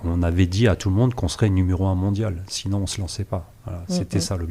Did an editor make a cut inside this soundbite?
no; 0 cuts

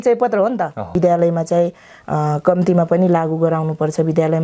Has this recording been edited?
yes; 1 cut; at 0.9 s

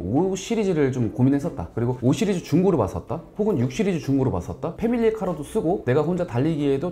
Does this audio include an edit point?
yes; 1 cut; at 4.7 s

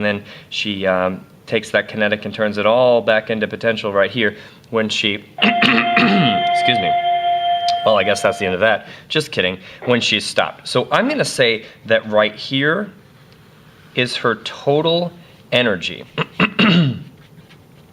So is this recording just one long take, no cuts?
no; 1 cut; at 4.9 s

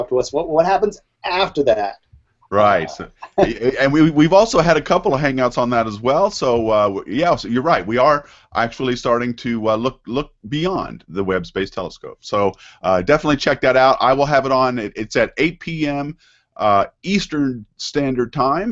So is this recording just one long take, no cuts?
no; 1 cut; at 11.4 s

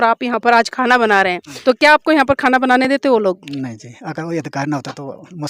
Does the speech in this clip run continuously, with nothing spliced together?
no; 1 cut; at 1.6 s

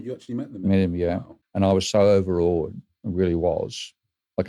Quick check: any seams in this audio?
yes; 1 cut; at 1.3 s

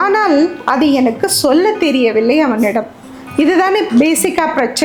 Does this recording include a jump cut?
no; 0 cuts

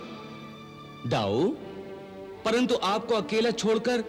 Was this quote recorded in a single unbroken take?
yes; 0 cuts

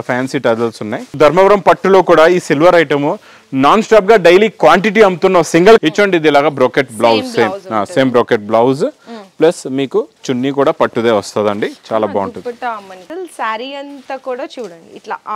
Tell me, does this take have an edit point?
yes; 3 cuts; at 1.1 s, 5.8 s, 13.1 s

